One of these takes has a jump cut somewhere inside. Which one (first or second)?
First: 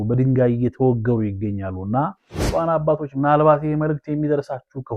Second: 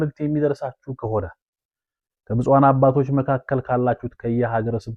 first